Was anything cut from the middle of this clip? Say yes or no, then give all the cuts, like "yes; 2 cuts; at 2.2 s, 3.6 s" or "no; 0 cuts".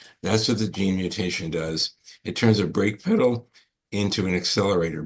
no; 0 cuts